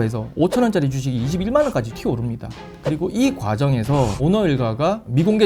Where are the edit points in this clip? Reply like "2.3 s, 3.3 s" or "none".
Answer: 1.9 s, 4.2 s